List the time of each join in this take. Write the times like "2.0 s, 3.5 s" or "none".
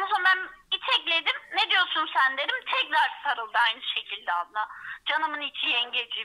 none